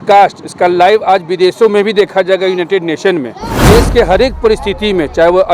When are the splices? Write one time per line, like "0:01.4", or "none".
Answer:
0:03.6